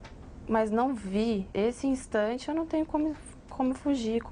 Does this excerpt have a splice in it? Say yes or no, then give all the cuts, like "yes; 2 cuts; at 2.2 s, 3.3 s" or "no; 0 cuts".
yes; 1 cut; at 1.5 s